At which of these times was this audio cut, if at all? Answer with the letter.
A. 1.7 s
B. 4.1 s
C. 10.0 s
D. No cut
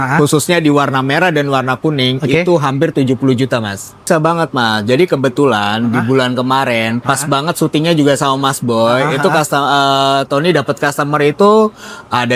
B